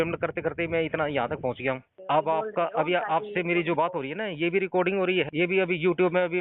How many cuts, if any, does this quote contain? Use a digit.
2